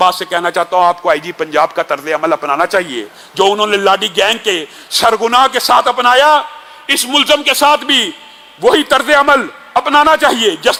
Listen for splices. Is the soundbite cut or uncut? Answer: uncut